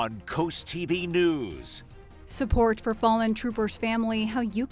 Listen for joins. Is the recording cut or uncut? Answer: uncut